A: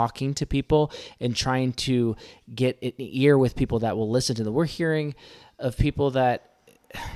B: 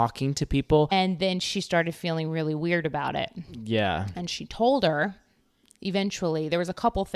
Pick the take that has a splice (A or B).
B